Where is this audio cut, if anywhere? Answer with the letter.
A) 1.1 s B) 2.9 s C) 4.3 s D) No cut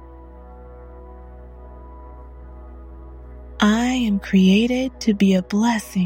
B